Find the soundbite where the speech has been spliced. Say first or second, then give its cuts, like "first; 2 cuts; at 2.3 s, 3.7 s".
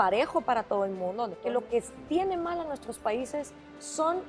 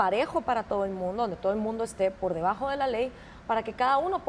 first; 1 cut; at 1.3 s